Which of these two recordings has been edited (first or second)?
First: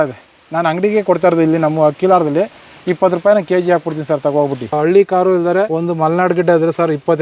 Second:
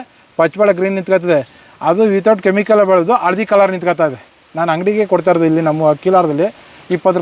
first